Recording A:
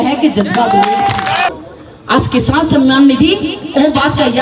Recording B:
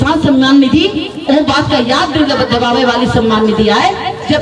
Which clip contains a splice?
A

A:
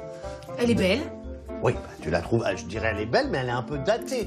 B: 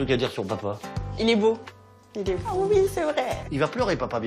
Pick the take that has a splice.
B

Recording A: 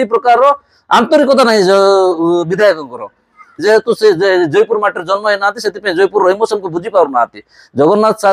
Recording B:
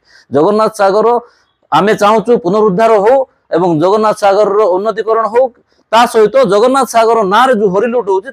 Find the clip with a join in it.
A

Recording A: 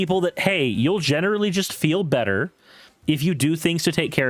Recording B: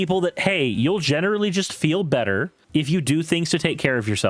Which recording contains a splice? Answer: B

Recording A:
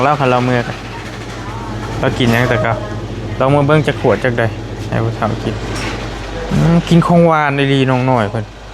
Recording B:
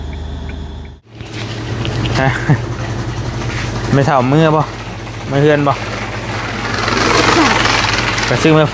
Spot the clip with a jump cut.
B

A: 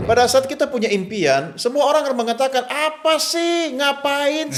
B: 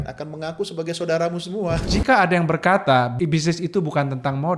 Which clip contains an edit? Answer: B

